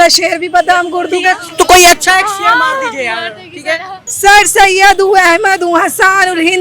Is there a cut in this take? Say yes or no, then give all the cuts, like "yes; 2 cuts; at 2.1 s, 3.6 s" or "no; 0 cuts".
yes; 1 cut; at 4.0 s